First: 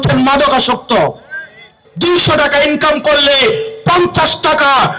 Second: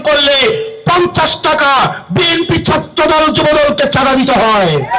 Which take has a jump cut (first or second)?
first